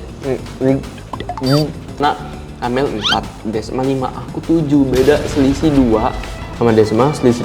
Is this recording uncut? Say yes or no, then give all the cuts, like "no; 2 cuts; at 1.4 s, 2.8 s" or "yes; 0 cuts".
no; 1 cut; at 2.0 s